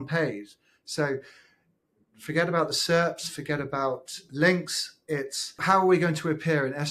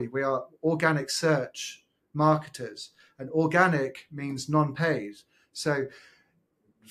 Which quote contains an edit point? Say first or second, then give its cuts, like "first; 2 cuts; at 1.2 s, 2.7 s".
first; 1 cut; at 5.6 s